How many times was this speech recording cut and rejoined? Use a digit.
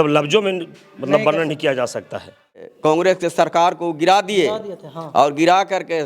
1